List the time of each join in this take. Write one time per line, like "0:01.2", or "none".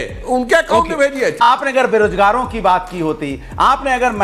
0:01.3